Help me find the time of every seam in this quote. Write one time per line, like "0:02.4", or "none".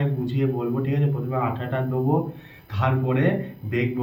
none